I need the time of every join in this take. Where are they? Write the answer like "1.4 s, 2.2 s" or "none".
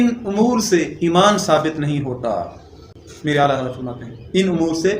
none